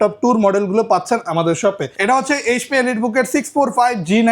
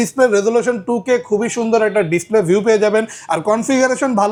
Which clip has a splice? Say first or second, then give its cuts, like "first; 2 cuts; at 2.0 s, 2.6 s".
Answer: first; 1 cut; at 1.9 s